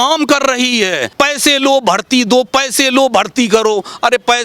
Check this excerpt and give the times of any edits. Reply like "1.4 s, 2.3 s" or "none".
1.0 s